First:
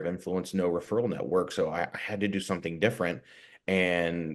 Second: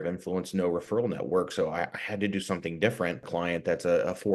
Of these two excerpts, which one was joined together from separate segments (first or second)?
second